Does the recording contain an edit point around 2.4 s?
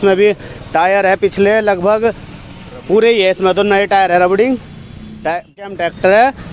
no; 1 cut; at 5.6 s

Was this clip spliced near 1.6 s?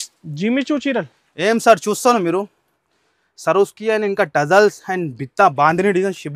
no; 0 cuts

